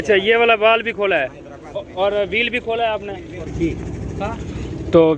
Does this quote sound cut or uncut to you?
cut